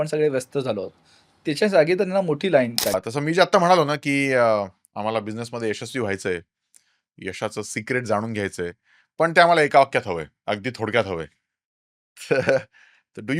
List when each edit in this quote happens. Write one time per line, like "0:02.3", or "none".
0:03.0